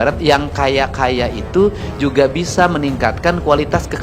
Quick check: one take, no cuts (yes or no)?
yes